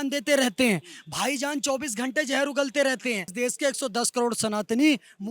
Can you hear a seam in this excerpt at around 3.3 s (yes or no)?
yes